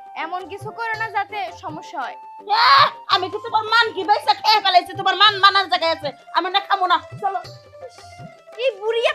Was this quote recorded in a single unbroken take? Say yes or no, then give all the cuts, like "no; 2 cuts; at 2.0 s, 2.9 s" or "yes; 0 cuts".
yes; 0 cuts